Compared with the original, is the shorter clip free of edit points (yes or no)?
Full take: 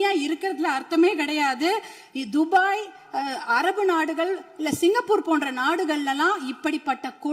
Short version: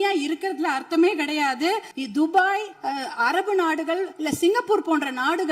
no